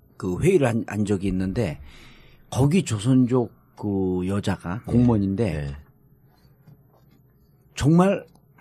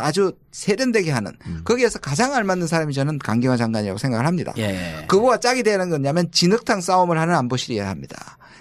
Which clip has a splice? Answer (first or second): second